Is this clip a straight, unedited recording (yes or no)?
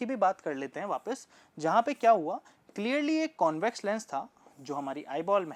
yes